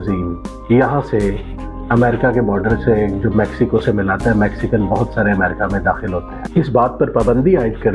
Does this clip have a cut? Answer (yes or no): yes